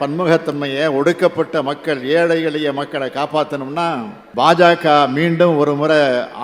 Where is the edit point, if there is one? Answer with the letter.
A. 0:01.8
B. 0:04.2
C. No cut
B